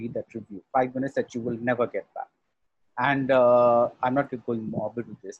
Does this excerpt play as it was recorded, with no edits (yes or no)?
yes